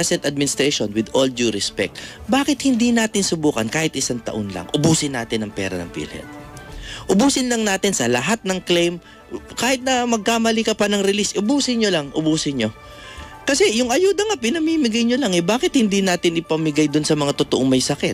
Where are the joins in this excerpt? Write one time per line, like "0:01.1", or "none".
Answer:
none